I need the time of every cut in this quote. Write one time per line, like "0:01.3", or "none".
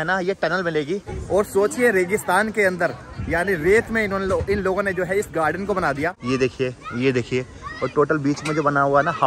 0:01.1
0:06.2